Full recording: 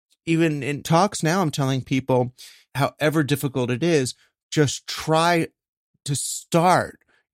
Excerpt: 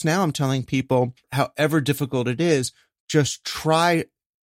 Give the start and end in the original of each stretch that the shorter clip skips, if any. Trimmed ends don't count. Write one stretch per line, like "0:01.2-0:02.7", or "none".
0:02.4-0:02.6